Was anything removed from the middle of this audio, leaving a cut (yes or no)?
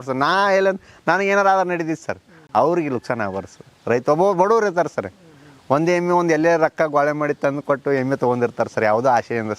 no